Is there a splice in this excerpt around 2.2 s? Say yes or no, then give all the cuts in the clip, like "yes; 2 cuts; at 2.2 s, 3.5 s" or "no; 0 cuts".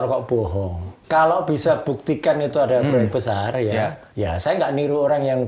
no; 2 cuts; at 0.9 s, 4.0 s